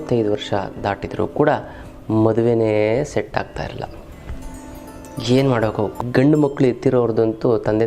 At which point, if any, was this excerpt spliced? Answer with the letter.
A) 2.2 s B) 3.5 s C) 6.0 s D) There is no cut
C